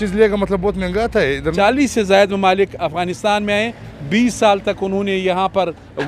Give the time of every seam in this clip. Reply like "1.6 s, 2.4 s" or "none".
1.5 s

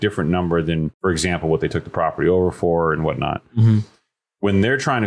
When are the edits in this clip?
0.9 s

